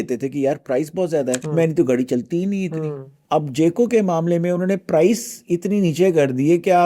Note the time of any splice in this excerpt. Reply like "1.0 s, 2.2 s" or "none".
1.4 s, 3.1 s